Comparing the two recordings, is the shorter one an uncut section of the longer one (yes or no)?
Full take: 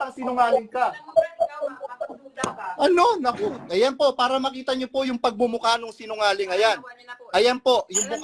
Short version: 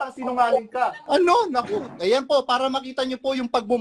no